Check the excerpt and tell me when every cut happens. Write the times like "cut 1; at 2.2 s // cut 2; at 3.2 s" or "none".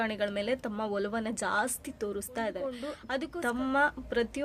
cut 1; at 2.9 s